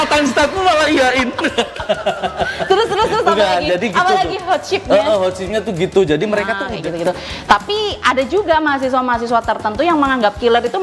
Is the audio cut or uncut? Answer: cut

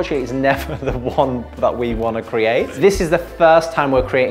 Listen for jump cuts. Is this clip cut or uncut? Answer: cut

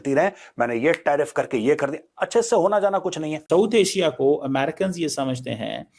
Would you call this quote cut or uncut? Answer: cut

